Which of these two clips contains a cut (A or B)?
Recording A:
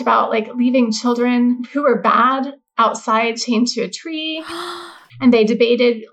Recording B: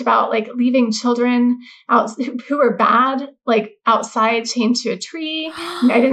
A